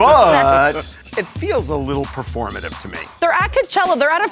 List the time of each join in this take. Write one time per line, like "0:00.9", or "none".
0:01.0
0:03.2